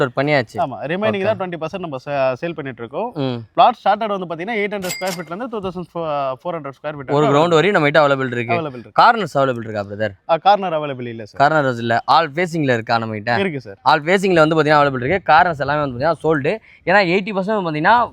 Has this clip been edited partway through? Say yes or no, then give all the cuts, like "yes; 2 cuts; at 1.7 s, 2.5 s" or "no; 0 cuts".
no; 0 cuts